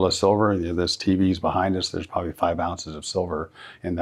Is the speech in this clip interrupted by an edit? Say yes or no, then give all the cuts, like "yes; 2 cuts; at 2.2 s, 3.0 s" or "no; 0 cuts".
no; 0 cuts